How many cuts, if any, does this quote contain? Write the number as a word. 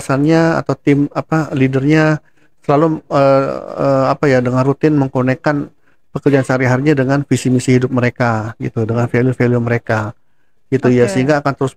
zero